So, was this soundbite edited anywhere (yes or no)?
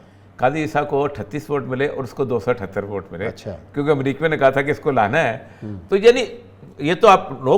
no